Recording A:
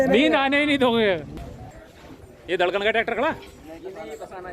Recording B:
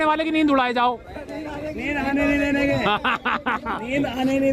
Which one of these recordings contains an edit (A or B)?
A